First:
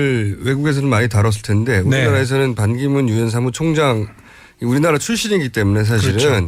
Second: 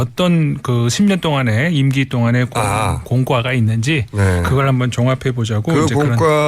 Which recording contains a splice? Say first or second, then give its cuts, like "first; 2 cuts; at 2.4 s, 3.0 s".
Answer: second; 1 cut; at 4.0 s